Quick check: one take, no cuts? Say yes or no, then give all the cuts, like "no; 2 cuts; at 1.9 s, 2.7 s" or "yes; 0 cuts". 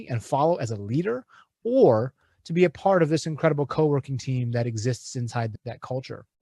no; 1 cut; at 5.5 s